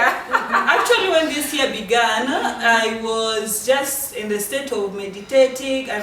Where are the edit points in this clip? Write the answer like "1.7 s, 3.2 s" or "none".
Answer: none